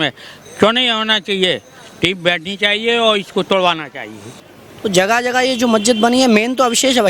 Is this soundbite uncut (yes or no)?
no